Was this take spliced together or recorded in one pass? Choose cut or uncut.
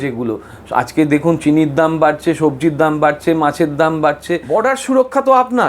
cut